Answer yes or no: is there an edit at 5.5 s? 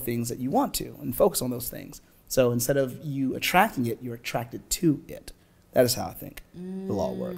no